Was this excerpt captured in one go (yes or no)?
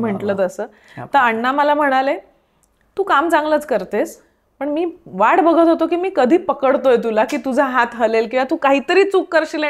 yes